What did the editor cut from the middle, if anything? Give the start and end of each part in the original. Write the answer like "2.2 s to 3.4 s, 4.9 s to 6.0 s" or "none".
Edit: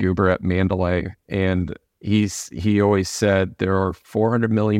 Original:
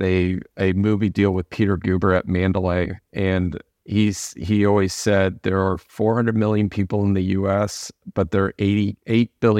none